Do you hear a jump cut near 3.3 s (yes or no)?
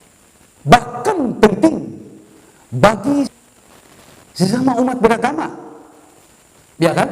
yes